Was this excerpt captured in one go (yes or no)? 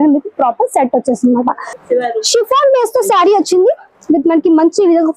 no